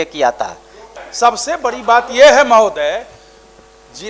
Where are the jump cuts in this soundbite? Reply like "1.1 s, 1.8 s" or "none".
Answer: 1.0 s